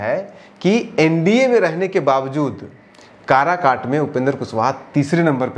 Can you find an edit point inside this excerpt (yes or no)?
no